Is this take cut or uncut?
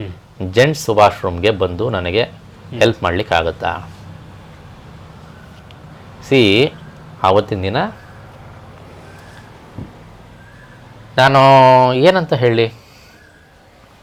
uncut